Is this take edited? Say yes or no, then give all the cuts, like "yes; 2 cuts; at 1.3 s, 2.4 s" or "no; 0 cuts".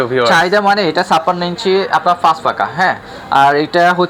no; 0 cuts